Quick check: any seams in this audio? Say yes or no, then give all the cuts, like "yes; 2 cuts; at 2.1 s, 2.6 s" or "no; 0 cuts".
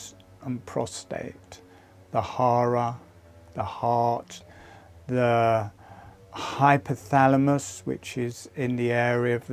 yes; 1 cut; at 4.4 s